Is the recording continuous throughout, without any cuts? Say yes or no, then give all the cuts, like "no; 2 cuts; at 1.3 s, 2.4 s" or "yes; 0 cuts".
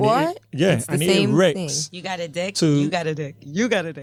yes; 0 cuts